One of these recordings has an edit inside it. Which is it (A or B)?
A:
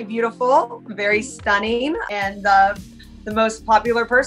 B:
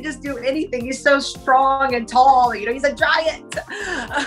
A